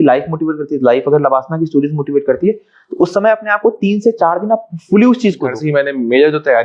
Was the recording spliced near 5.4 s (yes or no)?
yes